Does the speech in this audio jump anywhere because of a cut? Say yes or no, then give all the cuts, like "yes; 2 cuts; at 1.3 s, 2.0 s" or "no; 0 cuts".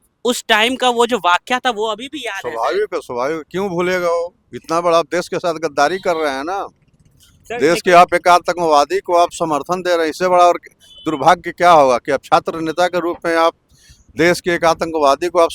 no; 0 cuts